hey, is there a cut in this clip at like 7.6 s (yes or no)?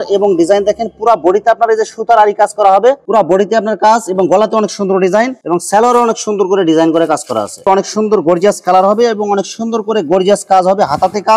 yes